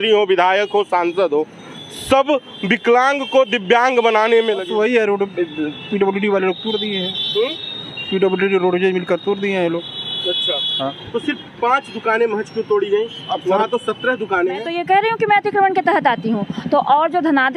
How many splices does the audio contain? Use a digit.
2